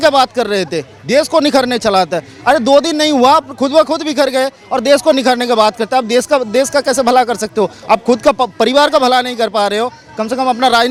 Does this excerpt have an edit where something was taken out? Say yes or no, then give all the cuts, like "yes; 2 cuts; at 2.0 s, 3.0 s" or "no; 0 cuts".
no; 0 cuts